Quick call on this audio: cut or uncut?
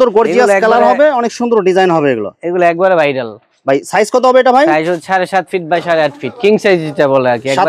uncut